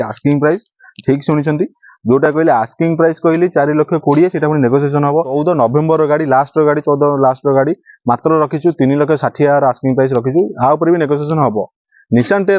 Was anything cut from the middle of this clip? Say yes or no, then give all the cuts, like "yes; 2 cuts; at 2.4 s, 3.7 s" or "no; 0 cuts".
yes; 1 cut; at 5.4 s